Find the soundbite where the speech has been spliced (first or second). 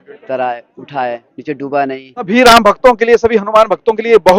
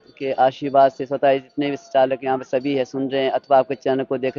first